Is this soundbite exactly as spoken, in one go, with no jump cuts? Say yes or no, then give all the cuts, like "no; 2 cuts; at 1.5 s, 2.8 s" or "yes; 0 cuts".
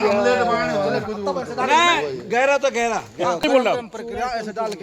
no; 1 cut; at 3.4 s